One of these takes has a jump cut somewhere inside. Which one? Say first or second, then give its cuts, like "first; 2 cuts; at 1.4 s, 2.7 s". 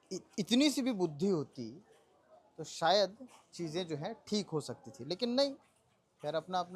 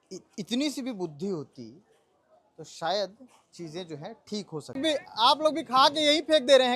second; 1 cut; at 4.8 s